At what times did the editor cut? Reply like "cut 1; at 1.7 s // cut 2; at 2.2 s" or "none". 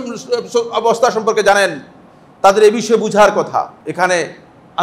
cut 1; at 3.8 s